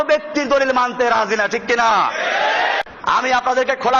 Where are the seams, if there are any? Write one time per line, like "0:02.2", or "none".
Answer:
0:02.8